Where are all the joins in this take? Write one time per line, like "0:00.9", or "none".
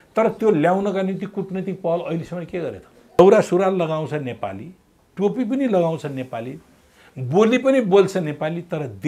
0:03.2

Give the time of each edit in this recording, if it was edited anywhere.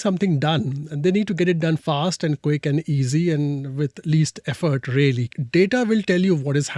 0:05.4

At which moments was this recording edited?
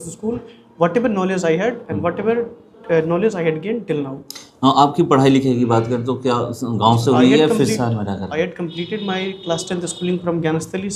none

